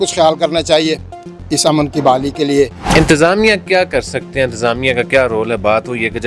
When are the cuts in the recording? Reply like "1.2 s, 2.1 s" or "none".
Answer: 2.9 s